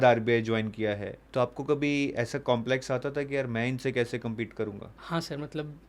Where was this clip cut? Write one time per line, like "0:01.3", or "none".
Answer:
0:01.2
0:04.9